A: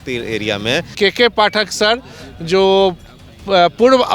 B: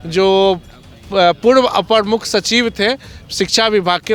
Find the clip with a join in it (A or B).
A